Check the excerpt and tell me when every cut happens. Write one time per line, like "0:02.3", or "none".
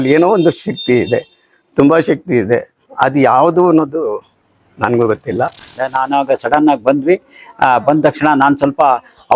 0:05.8